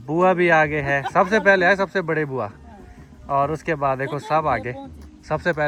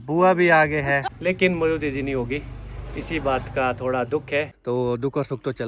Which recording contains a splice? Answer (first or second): second